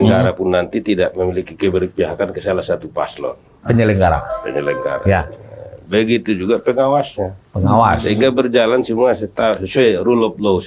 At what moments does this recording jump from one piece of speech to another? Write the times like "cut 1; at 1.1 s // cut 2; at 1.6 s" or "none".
none